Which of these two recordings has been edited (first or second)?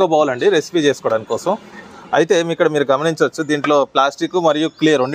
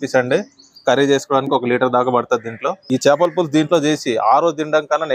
second